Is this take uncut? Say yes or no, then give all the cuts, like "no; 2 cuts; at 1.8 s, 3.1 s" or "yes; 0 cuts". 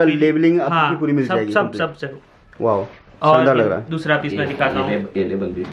yes; 0 cuts